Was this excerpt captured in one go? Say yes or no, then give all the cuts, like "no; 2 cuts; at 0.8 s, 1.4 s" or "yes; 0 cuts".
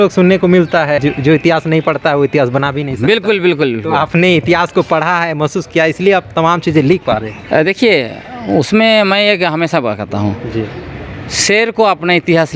no; 1 cut; at 1.0 s